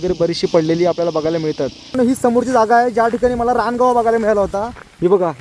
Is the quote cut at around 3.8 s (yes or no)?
no